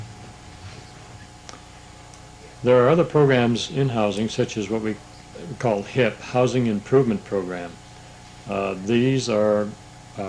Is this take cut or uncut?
uncut